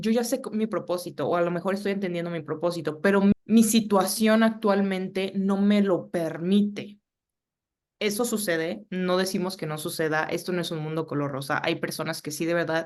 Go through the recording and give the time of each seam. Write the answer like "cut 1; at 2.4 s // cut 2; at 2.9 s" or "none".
none

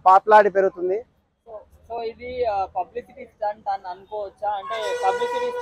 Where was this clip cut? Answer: none

